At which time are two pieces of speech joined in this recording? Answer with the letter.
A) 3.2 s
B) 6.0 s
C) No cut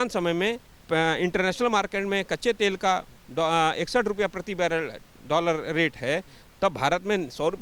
C